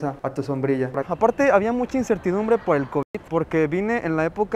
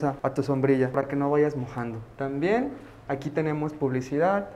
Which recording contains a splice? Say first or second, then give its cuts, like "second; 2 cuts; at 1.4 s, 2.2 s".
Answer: first; 1 cut; at 1.1 s